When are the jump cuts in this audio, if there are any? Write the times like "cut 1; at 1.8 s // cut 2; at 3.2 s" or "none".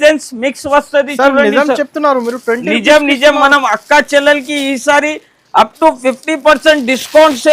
none